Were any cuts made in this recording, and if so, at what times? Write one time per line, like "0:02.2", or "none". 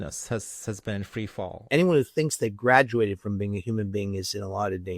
0:01.6